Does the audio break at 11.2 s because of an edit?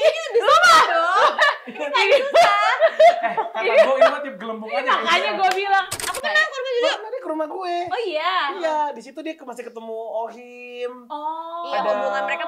no; 1 cut; at 6.0 s

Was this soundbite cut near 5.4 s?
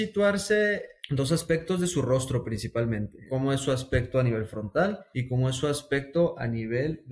no; 1 cut; at 3.1 s

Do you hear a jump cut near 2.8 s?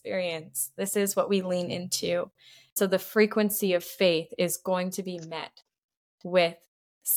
yes; 1 cut; at 2.8 s

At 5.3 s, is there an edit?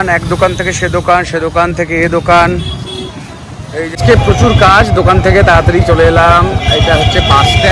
no; 1 cut; at 3.9 s

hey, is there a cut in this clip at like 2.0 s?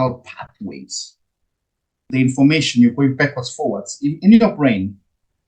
yes; 1 cut; at 2.0 s

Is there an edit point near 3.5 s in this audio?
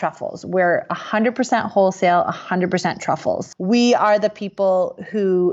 yes; 1 cut; at 3.5 s

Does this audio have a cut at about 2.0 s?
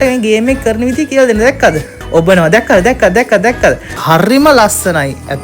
yes; 2 cuts; at 2.0 s, 4.0 s

